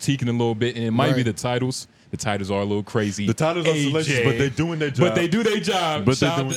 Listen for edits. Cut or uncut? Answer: uncut